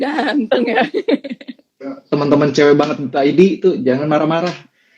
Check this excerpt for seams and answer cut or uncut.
cut